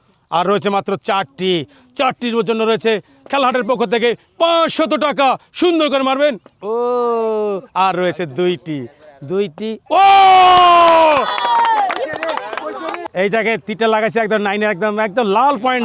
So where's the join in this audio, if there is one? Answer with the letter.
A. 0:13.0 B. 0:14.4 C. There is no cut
A